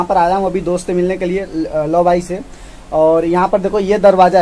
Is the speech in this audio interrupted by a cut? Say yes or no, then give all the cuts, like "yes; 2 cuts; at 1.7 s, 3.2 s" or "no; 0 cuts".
no; 0 cuts